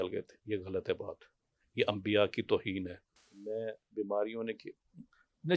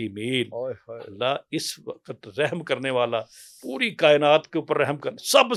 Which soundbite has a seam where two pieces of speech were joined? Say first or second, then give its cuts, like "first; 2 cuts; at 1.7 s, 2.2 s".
first; 1 cut; at 3.2 s